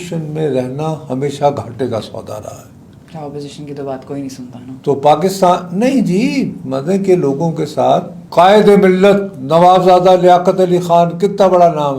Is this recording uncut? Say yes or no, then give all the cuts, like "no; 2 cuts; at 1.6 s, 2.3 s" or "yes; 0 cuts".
yes; 0 cuts